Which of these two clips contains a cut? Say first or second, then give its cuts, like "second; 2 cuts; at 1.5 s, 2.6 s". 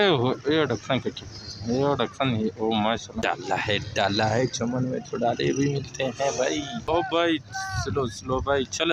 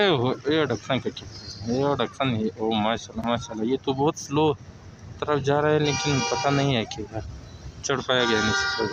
first; 2 cuts; at 3.1 s, 6.8 s